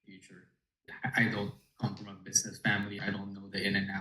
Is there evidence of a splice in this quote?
yes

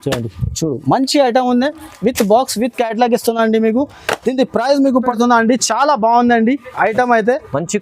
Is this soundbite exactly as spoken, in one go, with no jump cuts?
no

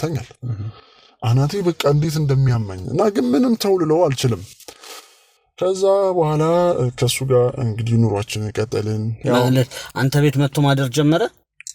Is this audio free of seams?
yes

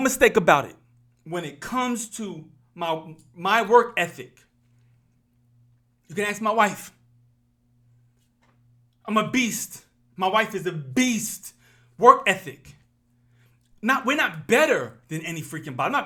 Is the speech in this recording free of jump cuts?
yes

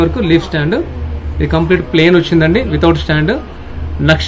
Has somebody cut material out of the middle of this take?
no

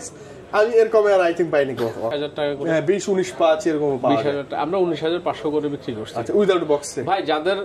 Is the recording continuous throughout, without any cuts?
no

